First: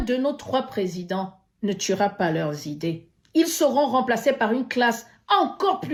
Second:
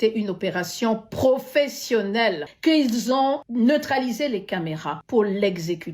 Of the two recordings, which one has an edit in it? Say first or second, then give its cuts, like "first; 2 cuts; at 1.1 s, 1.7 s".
second; 3 cuts; at 2.5 s, 3.5 s, 4.9 s